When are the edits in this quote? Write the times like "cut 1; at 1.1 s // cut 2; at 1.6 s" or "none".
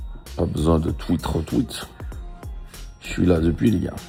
none